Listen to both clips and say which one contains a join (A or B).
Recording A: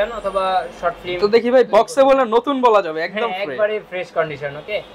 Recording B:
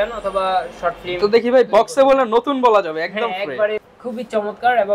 B